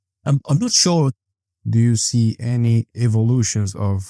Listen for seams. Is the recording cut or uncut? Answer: cut